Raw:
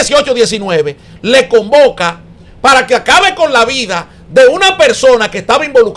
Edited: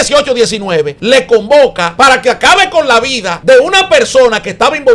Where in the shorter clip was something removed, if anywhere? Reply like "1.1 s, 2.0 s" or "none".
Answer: 1.0 s, 1.8 s, 3.3 s